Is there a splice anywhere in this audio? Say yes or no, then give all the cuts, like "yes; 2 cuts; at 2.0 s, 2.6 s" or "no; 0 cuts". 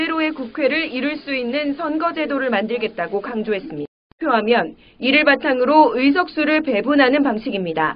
yes; 1 cut; at 4.1 s